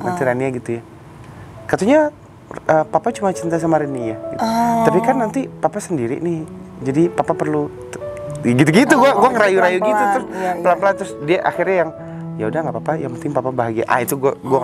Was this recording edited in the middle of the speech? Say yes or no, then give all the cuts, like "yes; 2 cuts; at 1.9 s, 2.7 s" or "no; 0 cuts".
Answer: no; 0 cuts